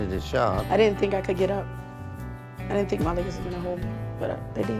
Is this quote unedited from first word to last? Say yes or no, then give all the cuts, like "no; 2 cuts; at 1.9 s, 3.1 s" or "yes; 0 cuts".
yes; 0 cuts